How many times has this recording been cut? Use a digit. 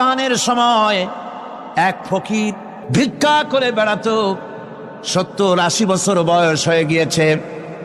1